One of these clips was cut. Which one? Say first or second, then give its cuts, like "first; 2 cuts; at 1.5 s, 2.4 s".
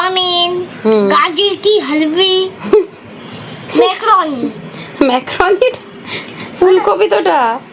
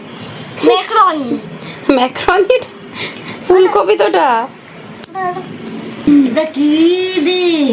second; 1 cut; at 6.1 s